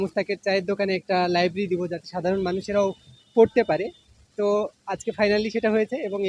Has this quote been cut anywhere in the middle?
no; 0 cuts

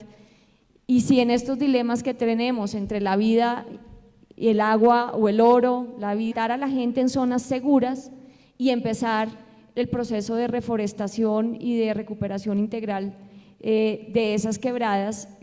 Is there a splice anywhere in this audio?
no; 0 cuts

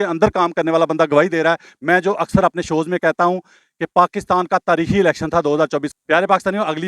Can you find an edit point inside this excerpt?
yes; 1 cut; at 5.9 s

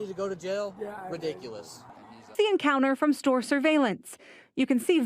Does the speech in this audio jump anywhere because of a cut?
yes; 1 cut; at 2.3 s

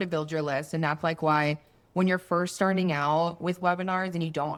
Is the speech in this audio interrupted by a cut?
no; 0 cuts

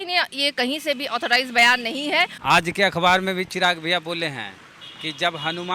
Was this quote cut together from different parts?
yes; 1 cut; at 2.3 s

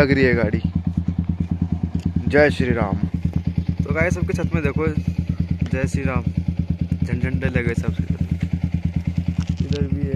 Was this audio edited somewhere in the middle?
yes; 1 cut; at 3.1 s

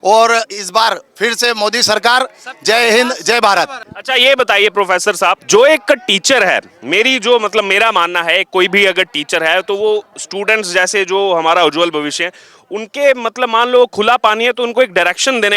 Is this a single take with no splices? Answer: yes; 0 cuts

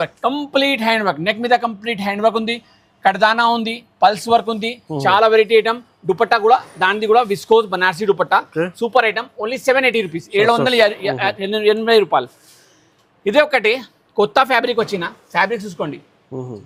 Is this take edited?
no; 0 cuts

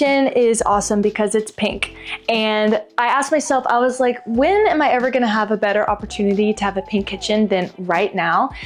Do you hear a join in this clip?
no; 0 cuts

